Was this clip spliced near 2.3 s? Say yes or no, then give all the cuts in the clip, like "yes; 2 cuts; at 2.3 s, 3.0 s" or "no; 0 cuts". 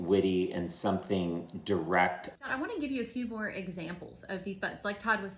yes; 1 cut; at 2.3 s